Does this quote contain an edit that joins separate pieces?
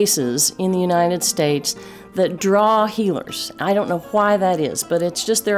no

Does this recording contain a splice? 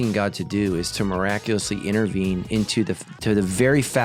no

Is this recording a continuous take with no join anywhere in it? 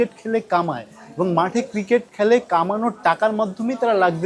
yes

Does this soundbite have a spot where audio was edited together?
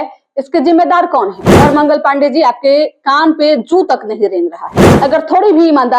yes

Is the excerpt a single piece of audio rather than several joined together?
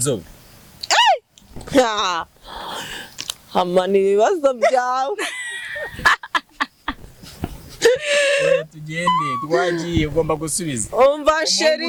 yes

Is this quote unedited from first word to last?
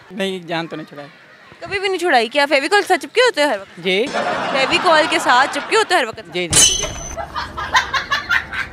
yes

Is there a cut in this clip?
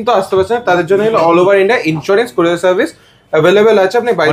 no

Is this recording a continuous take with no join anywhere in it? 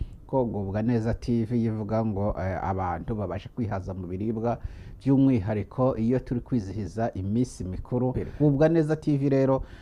no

